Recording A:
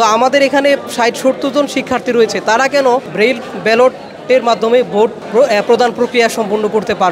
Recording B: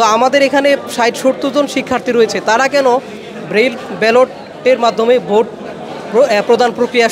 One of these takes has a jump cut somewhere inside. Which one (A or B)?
A